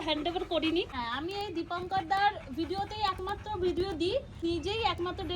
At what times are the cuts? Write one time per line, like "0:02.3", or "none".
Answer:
0:00.9
0:04.4